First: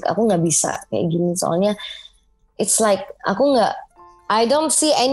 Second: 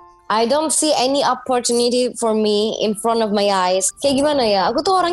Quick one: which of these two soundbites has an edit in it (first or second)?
second